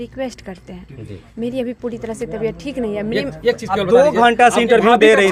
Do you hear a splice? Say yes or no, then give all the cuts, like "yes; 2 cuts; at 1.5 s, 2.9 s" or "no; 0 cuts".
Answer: no; 0 cuts